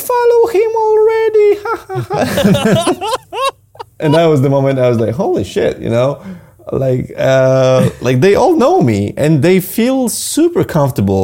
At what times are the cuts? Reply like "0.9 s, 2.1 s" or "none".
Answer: 4.0 s